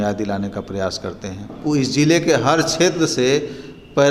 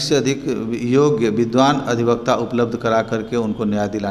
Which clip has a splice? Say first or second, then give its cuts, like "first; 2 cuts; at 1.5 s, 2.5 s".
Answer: first; 1 cut; at 1.5 s